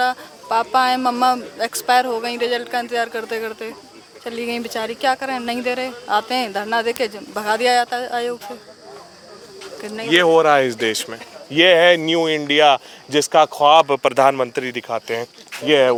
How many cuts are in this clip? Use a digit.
0